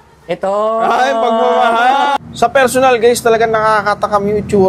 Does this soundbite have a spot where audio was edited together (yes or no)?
yes